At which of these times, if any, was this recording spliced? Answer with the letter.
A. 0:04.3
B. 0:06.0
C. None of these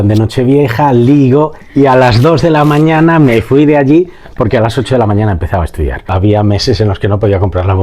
B